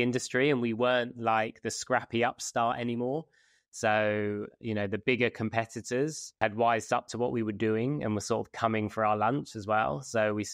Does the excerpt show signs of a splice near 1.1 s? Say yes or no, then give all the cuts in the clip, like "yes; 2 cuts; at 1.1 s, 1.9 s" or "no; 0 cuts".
no; 0 cuts